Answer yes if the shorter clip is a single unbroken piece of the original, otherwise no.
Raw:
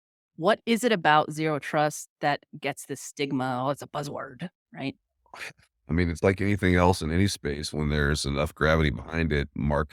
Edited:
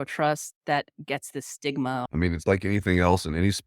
no